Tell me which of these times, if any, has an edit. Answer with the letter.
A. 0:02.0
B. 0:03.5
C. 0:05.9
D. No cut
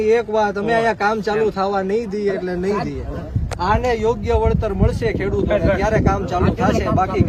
D